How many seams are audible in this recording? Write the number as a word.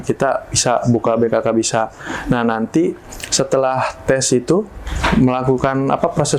one